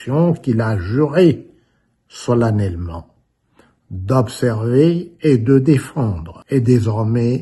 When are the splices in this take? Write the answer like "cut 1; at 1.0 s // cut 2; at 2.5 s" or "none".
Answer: cut 1; at 6.3 s

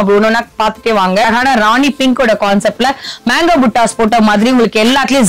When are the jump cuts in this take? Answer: cut 1; at 1.3 s

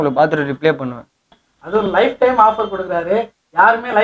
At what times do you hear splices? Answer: cut 1; at 1.4 s

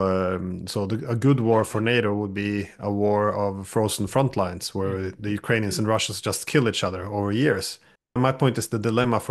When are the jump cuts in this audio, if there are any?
cut 1; at 8.1 s

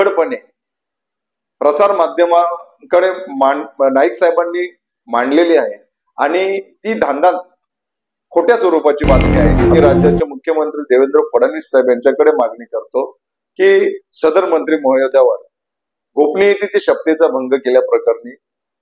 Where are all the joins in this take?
cut 1; at 9.7 s

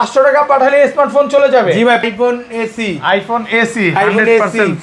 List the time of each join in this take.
cut 1; at 2.0 s

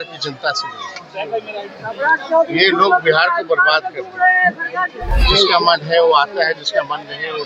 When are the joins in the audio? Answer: cut 1; at 5.1 s

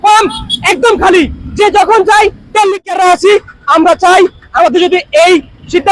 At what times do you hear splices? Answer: cut 1; at 2.8 s

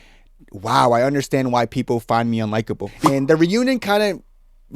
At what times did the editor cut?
cut 1; at 2.9 s

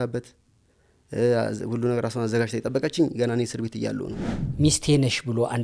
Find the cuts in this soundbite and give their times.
cut 1; at 4.3 s

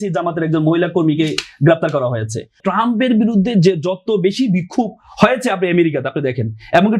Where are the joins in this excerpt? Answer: cut 1; at 2.5 s

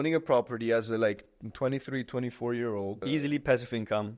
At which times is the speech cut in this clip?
cut 1; at 3.0 s

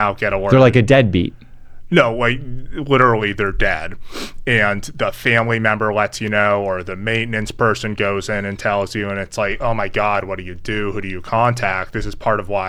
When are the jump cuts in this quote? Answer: none

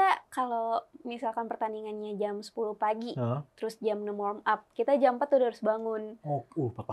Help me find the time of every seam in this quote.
none

